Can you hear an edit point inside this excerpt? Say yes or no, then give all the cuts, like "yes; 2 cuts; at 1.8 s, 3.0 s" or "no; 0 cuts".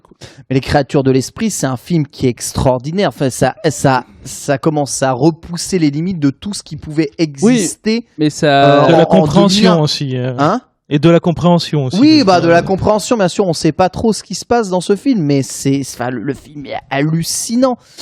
no; 0 cuts